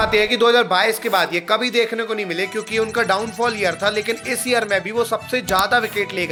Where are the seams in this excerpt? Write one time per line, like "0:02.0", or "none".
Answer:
none